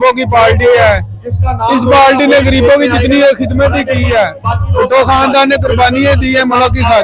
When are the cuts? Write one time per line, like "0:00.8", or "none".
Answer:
none